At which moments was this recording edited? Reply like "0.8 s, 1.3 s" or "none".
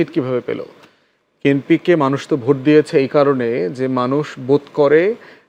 none

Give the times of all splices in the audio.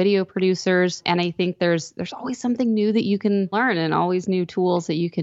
1.0 s, 3.5 s

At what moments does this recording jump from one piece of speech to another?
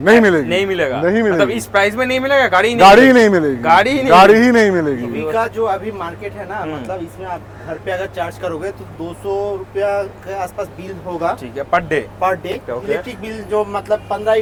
none

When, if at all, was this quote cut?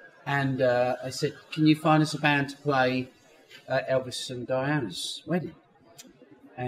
2.2 s

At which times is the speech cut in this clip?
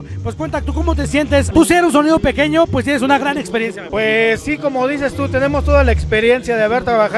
none

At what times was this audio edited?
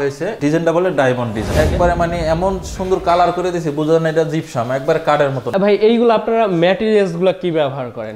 1.4 s, 5.5 s

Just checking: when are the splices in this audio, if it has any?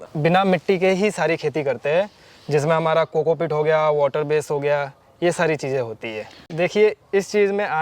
6.5 s

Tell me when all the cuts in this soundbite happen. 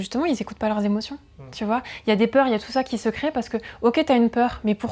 none

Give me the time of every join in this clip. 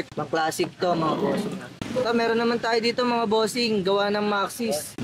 1.8 s

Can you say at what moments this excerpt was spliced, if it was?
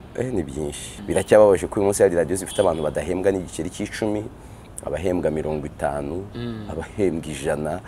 0.9 s

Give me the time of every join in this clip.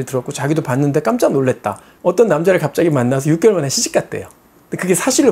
1.9 s

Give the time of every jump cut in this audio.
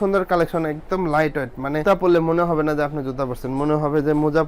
none

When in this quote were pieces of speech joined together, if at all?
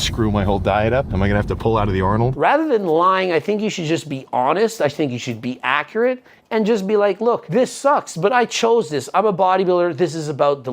1.1 s, 2.3 s, 7.4 s

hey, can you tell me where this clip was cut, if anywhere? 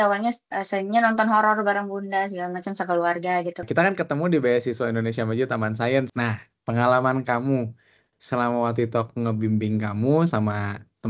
3.7 s, 6.1 s

